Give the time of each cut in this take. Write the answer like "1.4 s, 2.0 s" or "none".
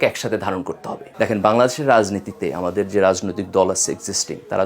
1.0 s